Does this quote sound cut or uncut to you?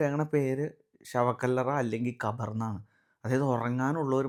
uncut